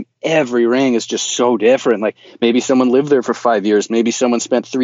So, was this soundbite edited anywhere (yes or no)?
no